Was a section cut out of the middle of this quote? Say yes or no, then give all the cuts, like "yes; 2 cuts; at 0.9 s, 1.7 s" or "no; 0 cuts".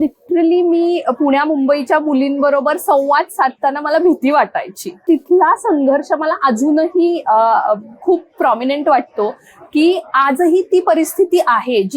yes; 1 cut; at 4.9 s